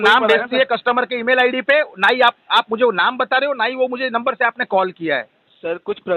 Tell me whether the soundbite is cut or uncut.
uncut